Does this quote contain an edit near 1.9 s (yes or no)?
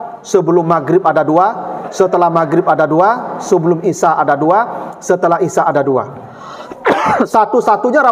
no